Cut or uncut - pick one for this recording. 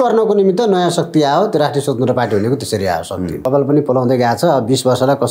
cut